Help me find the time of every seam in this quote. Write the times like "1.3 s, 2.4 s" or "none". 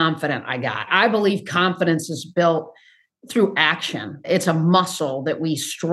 none